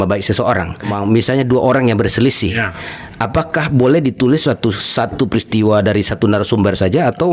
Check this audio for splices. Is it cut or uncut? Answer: cut